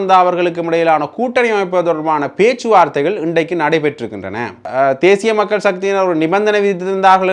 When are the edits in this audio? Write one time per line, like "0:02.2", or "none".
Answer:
0:04.7